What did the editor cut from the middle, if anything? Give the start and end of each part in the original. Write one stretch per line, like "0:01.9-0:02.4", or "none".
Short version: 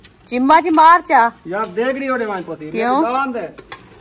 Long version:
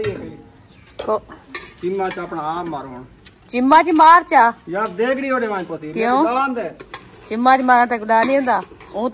none